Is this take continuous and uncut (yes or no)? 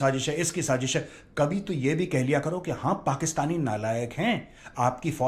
yes